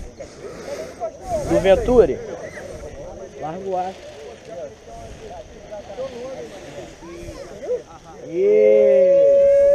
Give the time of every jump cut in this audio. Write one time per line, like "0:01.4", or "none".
0:01.6